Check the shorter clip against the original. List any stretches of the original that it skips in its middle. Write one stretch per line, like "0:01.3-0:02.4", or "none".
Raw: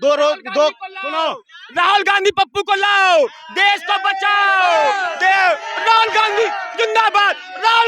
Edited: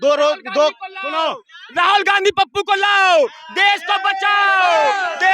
none